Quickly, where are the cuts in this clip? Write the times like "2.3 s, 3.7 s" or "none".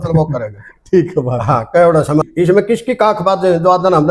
2.2 s

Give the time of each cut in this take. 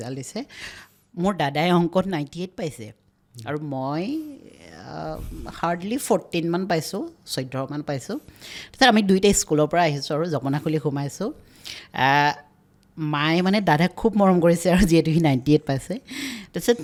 none

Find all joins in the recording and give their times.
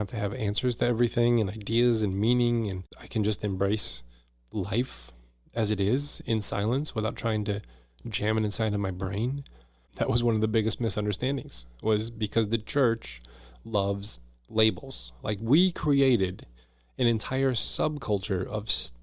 3.0 s, 9.8 s

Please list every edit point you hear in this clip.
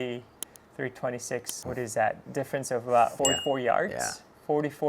1.5 s, 3.1 s

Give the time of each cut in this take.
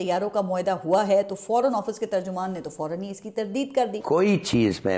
4.0 s

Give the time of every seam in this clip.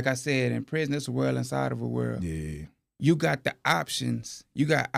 none

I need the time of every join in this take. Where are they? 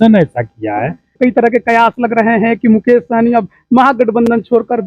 1.2 s

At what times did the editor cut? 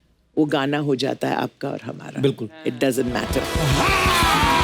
3.5 s

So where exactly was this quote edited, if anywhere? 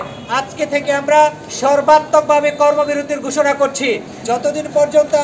4.1 s

